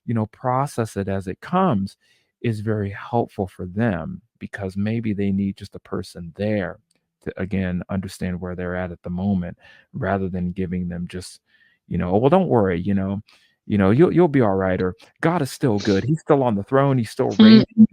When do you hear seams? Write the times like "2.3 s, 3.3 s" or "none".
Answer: 4.4 s